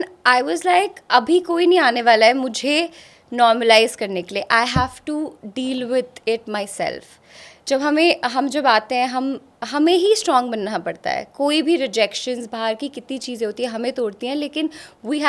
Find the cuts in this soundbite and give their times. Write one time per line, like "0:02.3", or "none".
none